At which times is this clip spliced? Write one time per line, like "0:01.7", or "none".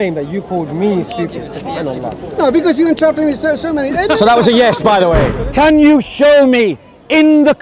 0:05.3